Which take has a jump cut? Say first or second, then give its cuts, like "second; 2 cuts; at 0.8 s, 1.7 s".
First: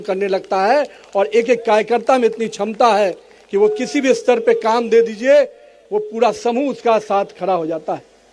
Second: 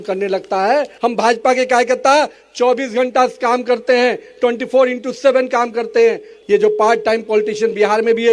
second; 2 cuts; at 0.9 s, 6.3 s